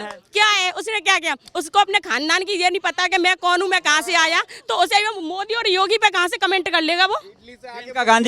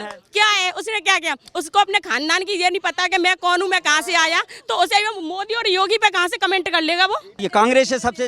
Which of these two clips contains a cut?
second; 1 cut; at 7.3 s

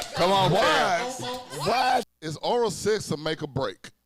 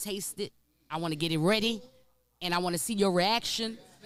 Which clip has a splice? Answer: first; 1 cut; at 2.2 s

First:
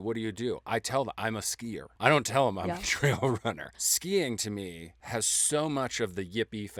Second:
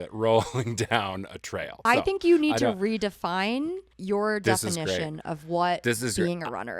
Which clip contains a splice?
second; 1 cut; at 1.7 s

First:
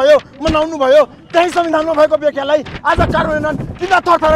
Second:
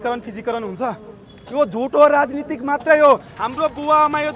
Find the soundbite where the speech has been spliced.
second; 1 cut; at 3.3 s

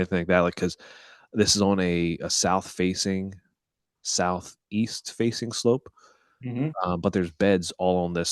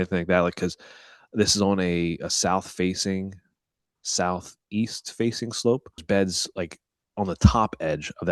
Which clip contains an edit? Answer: second; 1 cut; at 6.0 s

